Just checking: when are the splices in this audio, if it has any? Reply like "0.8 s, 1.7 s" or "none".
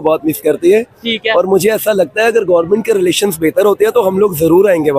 none